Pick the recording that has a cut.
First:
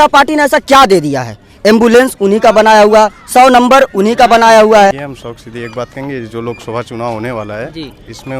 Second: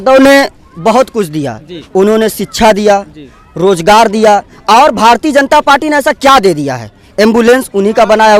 first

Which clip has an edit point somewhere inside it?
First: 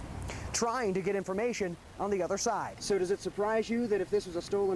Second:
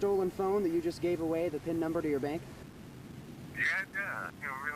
first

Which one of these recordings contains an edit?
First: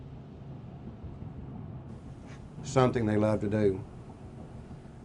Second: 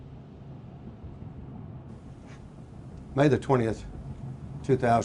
second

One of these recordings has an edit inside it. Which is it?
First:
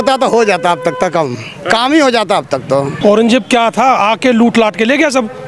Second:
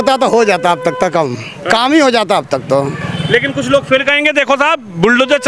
first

